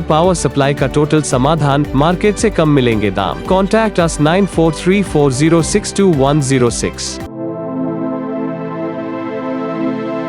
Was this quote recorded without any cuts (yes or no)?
yes